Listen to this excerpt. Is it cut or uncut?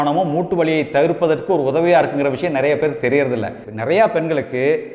cut